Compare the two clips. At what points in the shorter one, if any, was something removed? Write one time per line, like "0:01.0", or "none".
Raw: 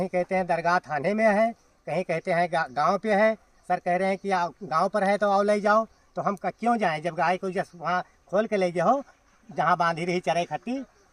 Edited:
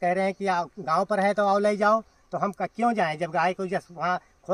none

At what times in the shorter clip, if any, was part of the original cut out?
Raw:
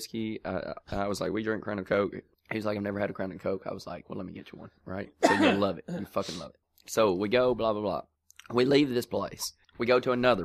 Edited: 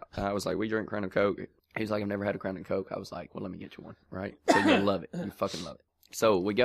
none

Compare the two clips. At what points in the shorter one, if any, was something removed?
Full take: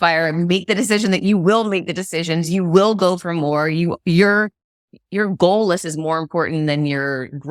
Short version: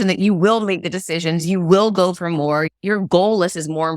0:02.7

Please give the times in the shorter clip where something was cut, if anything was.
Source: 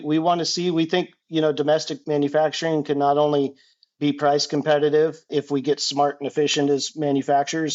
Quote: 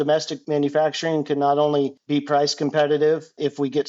0:02.0

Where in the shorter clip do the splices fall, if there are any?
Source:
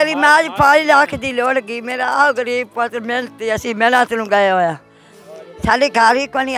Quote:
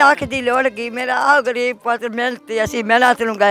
none

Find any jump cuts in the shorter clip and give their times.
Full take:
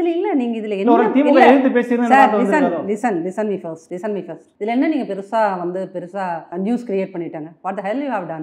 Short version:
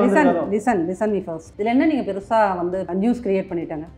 0:01.4
0:02.9

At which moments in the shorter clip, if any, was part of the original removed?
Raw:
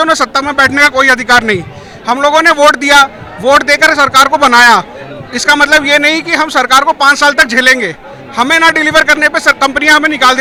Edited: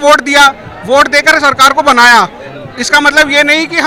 none

